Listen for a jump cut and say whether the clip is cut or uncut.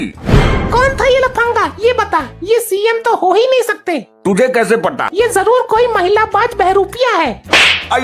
cut